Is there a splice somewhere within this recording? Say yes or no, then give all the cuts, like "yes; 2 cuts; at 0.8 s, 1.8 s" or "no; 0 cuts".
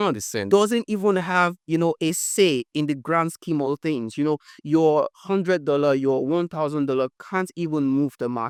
no; 0 cuts